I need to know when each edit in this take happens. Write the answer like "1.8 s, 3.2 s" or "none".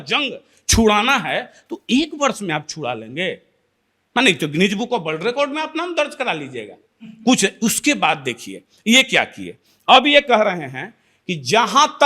none